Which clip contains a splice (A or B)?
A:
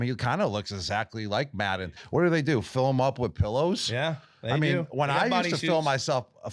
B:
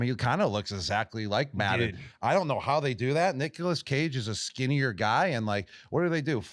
A